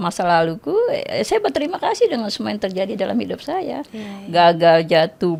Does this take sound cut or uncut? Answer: uncut